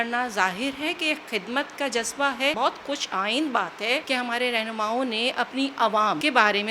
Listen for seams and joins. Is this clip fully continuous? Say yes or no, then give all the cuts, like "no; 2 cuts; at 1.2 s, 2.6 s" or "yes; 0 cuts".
yes; 0 cuts